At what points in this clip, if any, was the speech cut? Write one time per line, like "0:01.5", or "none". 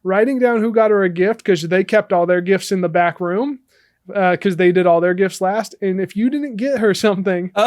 none